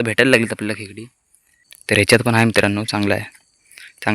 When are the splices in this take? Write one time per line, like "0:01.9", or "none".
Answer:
0:01.9

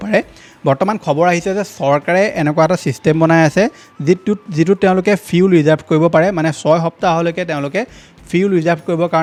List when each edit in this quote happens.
none

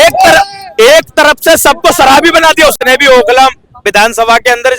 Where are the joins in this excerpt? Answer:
0:02.8

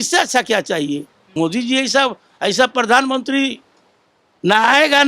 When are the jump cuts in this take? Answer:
0:01.2

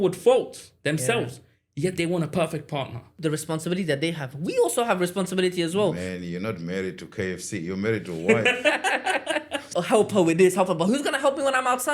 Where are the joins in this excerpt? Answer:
0:03.2
0:06.0
0:09.7

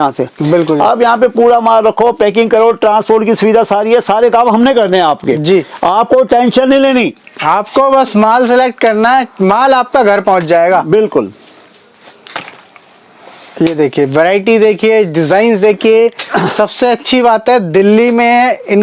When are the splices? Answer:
none

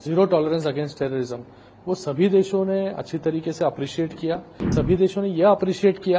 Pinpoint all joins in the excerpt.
0:04.7

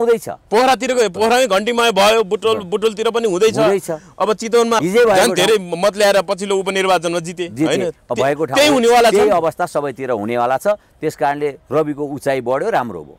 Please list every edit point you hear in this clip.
0:04.8

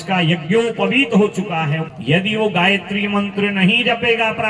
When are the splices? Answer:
0:01.9

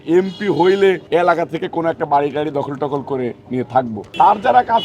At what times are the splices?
0:01.0
0:04.0

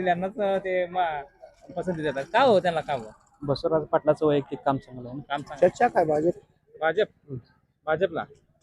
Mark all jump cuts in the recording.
0:05.4

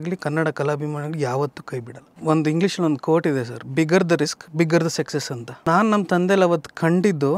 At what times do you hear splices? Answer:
0:02.1
0:05.7

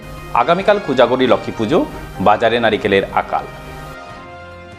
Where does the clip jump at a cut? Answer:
none

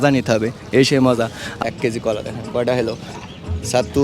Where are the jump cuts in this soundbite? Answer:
0:01.5

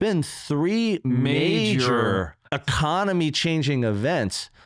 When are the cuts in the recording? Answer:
0:02.6

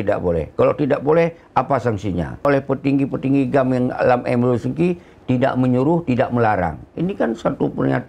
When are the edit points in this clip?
0:02.4

